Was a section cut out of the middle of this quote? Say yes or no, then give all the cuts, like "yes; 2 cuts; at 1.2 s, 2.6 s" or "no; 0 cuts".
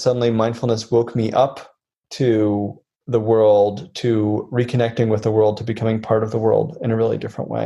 no; 0 cuts